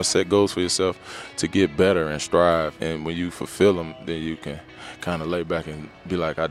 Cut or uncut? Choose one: cut